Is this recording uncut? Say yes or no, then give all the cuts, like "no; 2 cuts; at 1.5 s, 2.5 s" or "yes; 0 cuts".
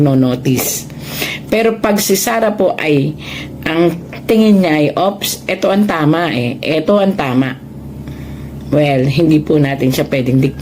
yes; 0 cuts